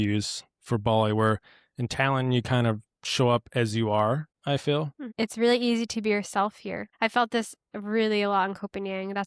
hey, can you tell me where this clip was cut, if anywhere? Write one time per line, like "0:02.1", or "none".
0:04.3
0:05.0
0:06.9

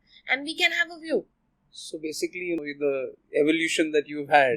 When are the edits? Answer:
0:02.6

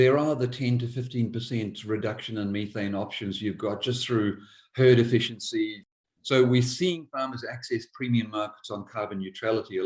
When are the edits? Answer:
0:05.8

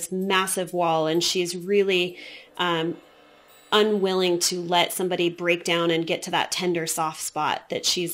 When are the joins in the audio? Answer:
none

